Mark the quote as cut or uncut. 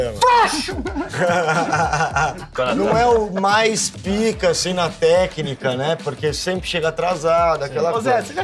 cut